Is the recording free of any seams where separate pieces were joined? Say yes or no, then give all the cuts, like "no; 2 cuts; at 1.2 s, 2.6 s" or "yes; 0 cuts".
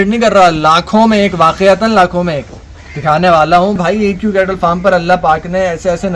no; 1 cut; at 3.8 s